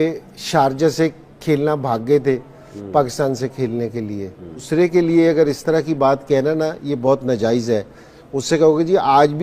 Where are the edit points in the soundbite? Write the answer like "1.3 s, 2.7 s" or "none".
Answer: 4.6 s

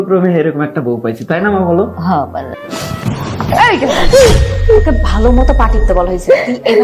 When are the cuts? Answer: 2.6 s

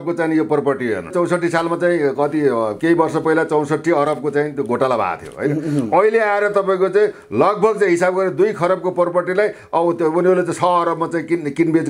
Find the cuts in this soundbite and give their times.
1.1 s

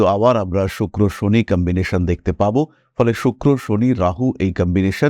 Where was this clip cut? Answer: none

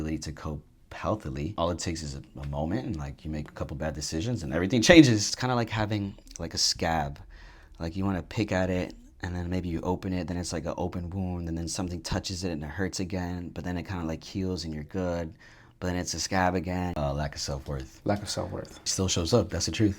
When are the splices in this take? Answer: 1.5 s, 5.3 s, 17.0 s, 18.8 s

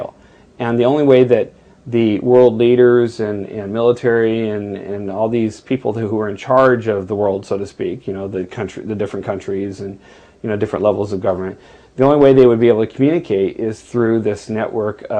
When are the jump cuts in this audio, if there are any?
none

